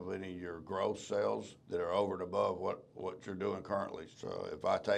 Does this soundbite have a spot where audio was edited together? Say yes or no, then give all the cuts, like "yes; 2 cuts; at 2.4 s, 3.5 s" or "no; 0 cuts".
yes; 2 cuts; at 1.5 s, 4.0 s